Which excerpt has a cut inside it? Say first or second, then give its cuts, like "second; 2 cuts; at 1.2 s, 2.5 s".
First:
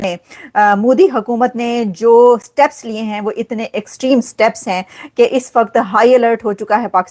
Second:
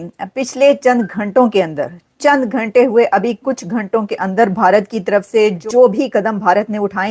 second; 1 cut; at 5.6 s